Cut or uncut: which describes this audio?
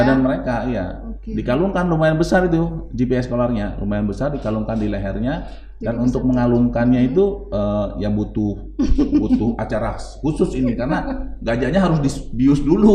uncut